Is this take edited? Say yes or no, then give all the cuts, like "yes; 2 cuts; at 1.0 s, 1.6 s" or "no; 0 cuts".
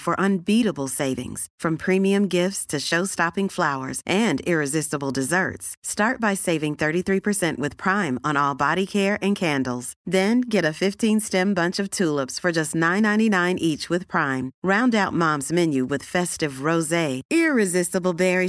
no; 0 cuts